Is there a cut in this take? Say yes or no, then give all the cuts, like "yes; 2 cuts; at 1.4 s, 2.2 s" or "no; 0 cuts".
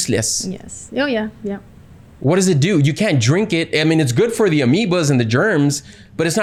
no; 0 cuts